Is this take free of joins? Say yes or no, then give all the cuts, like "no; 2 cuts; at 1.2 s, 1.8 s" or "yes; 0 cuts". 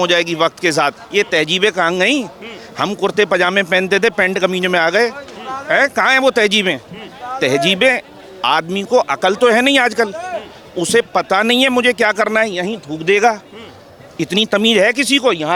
yes; 0 cuts